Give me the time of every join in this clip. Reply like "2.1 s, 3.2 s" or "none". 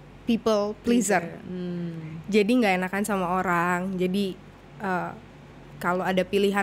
none